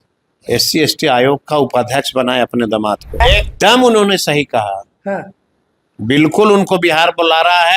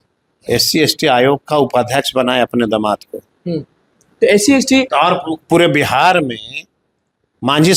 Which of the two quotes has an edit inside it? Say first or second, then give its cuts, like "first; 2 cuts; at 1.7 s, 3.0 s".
first; 1 cut; at 3.2 s